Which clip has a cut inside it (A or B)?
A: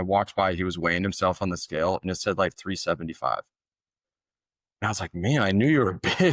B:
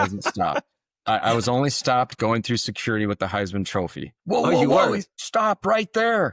B